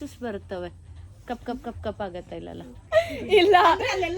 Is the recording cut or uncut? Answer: cut